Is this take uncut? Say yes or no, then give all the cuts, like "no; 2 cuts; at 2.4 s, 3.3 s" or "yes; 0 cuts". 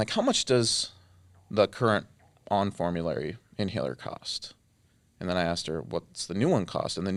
yes; 0 cuts